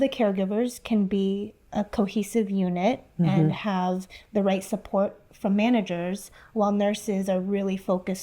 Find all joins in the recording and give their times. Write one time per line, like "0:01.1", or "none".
none